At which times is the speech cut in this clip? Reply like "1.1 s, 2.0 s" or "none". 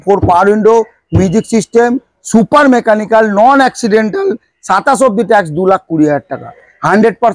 none